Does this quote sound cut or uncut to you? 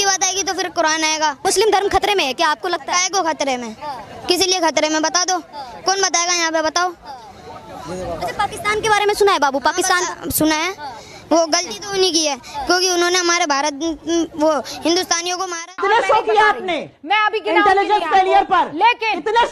cut